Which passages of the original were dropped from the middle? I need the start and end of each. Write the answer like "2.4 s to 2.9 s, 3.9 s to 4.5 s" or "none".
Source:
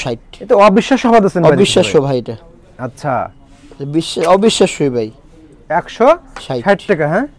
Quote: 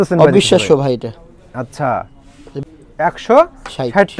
3.7 s to 5.2 s

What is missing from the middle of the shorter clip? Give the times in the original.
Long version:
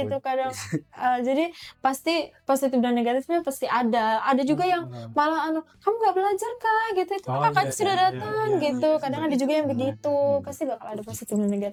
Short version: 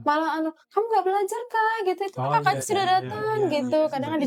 none

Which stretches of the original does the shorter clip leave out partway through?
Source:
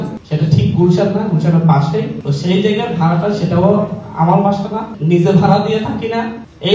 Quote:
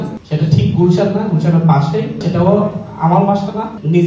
2.2 s to 3.4 s

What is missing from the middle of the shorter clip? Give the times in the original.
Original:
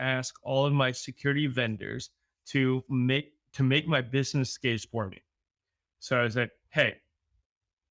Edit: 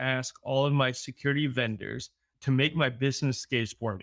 2.3 s to 3.4 s

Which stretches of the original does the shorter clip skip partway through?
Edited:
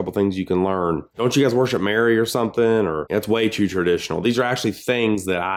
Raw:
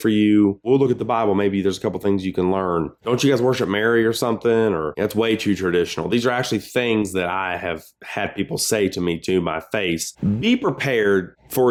none

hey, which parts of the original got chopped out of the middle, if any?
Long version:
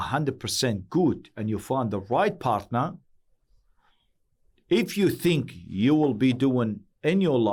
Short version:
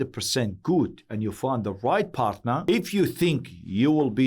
2.9 s to 4.7 s

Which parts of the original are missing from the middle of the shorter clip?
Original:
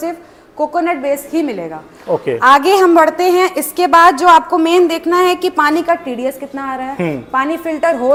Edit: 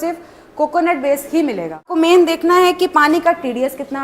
1.9 s to 4.5 s

